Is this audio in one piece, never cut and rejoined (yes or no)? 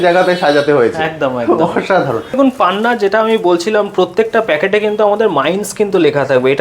no